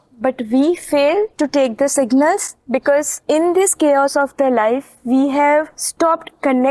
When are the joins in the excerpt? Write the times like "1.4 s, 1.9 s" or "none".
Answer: 1.3 s, 3.1 s, 5.8 s